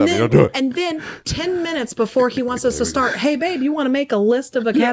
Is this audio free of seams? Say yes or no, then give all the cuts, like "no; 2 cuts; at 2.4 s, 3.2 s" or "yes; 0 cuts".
yes; 0 cuts